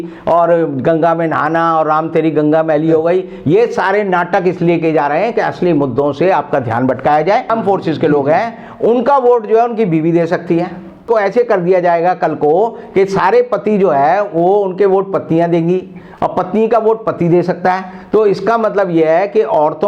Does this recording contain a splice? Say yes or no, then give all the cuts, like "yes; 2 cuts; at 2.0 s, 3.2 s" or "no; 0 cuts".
yes; 2 cuts; at 7.5 s, 11.0 s